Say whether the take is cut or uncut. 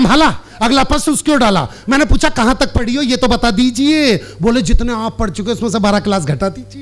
uncut